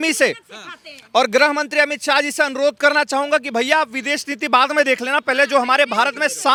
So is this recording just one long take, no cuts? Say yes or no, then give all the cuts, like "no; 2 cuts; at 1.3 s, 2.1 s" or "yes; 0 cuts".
yes; 0 cuts